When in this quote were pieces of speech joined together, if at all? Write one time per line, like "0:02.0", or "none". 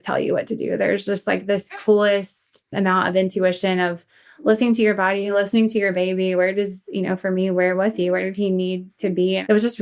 0:02.7